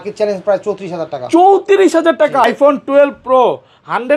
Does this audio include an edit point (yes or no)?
yes